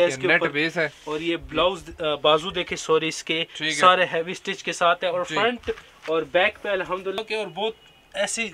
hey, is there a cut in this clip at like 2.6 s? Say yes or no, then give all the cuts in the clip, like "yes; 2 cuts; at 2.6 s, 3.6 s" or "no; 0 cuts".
no; 1 cut; at 7.2 s